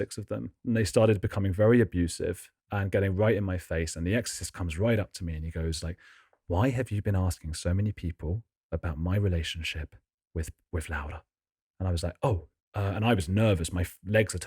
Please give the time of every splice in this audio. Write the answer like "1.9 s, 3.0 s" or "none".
none